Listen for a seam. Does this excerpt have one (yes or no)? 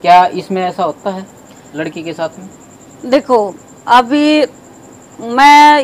no